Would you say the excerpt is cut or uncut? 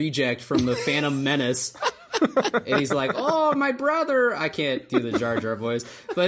cut